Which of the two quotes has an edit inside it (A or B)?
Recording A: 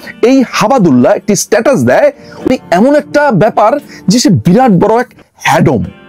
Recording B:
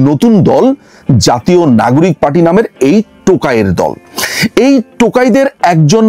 A